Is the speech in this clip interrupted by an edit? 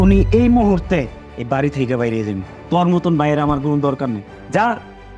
no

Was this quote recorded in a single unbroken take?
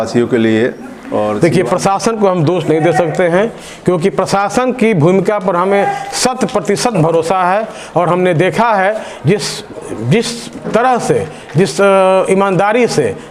no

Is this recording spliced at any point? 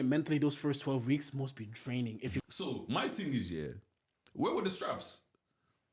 yes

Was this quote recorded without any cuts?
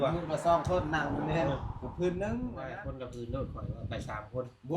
no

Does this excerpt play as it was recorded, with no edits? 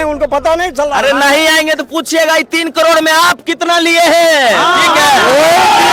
yes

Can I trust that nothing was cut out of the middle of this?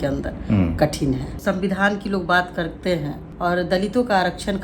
no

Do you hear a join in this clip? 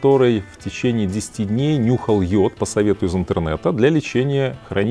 no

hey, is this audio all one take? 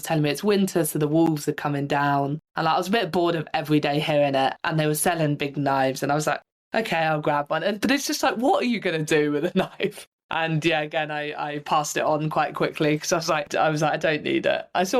no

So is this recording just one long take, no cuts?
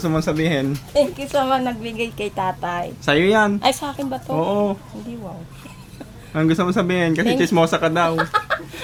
yes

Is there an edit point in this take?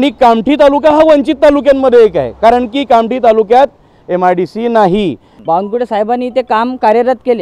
yes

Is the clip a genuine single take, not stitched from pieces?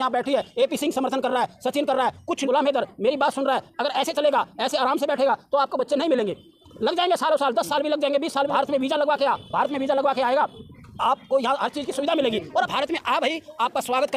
no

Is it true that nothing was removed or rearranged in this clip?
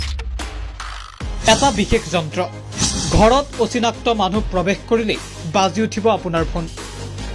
no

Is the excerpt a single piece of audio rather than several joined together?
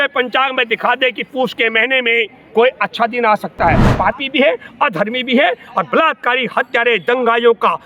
no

